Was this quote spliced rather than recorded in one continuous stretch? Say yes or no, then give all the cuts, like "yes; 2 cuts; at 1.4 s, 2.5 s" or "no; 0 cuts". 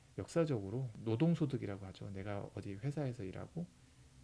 yes; 1 cut; at 0.9 s